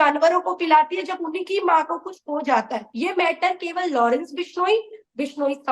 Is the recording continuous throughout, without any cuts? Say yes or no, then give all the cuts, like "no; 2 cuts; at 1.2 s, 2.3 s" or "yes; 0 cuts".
no; 1 cut; at 2.8 s